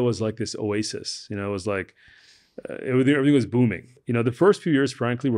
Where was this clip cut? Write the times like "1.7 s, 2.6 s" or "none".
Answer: 3.9 s